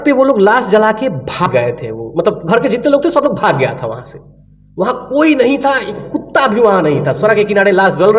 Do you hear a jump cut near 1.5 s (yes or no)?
yes